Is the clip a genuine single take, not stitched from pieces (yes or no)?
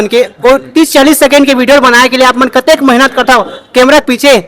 yes